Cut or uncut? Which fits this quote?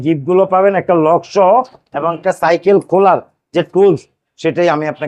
uncut